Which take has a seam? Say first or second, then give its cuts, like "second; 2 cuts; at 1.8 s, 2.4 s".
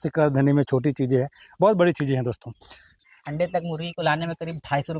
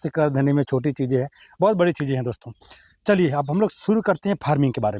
first; 1 cut; at 2.9 s